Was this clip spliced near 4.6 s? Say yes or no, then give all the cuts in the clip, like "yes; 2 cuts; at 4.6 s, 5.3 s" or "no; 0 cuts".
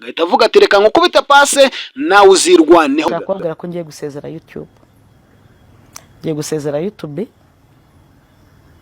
no; 1 cut; at 3.1 s